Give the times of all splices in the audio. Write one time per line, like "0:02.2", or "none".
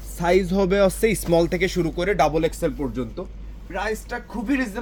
none